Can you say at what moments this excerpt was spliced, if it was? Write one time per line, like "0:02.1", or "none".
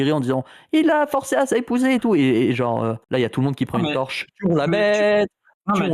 0:03.0